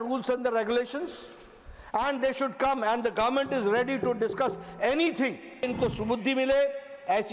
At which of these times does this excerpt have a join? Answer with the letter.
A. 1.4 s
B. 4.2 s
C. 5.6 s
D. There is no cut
C